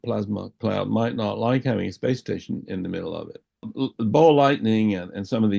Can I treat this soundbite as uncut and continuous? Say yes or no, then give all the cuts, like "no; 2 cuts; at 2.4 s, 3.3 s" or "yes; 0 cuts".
no; 1 cut; at 3.7 s